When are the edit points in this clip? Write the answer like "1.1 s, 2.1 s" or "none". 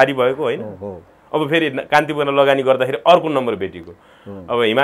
none

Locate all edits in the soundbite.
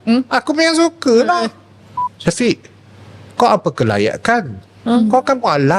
2.1 s

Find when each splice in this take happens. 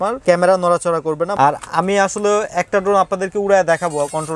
1.3 s

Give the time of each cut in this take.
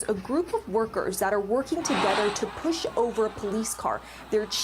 none

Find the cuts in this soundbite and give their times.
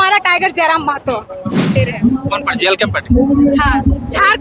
1.8 s

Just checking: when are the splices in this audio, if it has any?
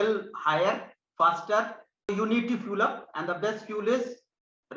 2.1 s

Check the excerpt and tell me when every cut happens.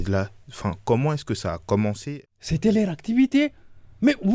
2.0 s

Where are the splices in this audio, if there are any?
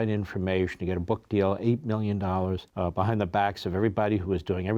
2.7 s

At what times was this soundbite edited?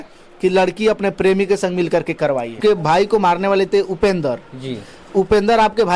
2.6 s

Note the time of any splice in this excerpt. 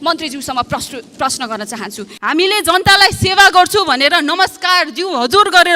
2.1 s

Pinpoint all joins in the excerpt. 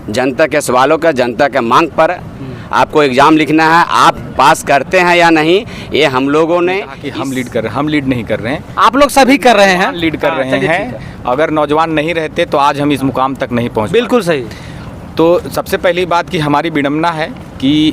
7.0 s

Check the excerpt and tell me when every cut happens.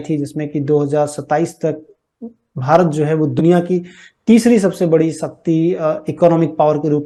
none

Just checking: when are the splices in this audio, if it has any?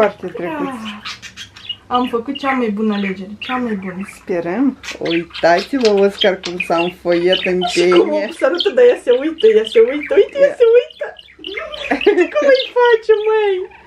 4.9 s

